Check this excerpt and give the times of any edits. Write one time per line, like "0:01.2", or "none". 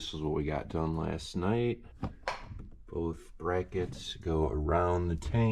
none